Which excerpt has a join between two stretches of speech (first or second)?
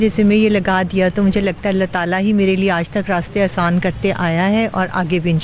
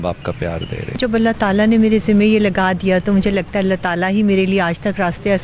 second